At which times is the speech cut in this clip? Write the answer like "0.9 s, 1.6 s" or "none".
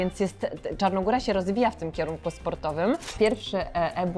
3.1 s